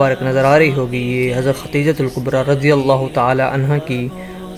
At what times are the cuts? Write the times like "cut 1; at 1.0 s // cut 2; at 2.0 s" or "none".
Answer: none